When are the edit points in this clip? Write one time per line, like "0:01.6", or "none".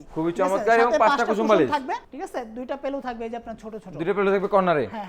0:02.1